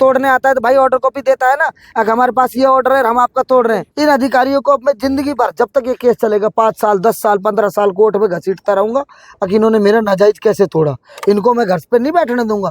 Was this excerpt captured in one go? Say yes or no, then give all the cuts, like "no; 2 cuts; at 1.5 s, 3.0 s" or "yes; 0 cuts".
no; 1 cut; at 3.9 s